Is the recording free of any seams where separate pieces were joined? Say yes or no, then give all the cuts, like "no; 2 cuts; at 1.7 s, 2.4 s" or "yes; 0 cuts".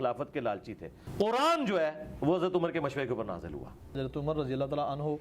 no; 2 cuts; at 0.9 s, 4.0 s